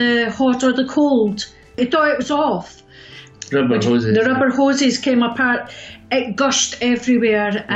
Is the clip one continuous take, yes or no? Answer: no